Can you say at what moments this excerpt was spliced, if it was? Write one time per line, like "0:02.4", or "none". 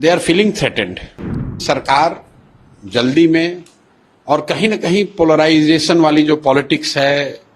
0:01.5